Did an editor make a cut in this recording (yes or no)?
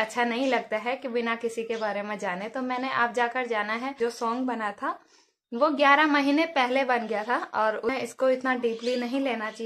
yes